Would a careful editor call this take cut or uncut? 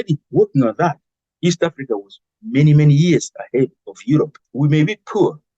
cut